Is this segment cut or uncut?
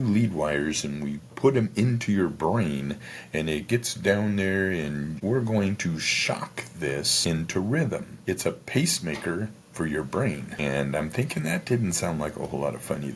cut